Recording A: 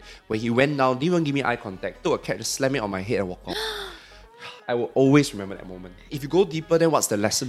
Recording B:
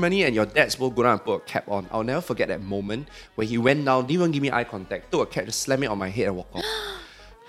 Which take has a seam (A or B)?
A